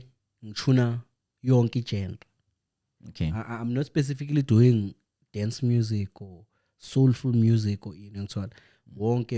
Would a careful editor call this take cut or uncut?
uncut